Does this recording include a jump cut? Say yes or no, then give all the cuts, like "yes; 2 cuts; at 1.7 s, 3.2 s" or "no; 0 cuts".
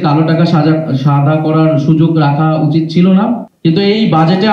yes; 1 cut; at 3.5 s